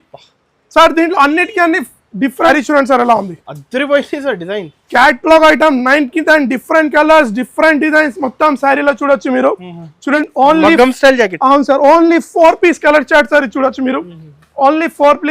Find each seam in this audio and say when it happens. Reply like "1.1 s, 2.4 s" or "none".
2.5 s, 10.2 s